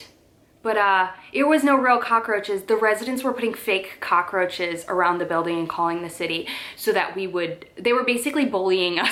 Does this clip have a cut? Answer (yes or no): no